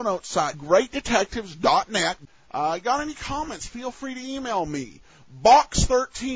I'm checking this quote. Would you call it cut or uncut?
uncut